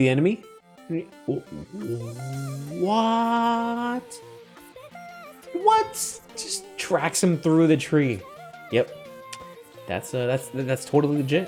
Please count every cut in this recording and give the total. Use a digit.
0